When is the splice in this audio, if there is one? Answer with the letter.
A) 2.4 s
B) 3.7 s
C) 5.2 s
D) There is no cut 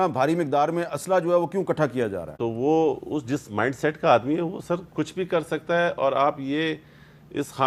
D